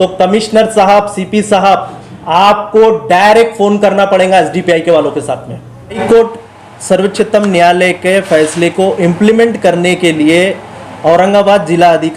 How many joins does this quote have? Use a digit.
1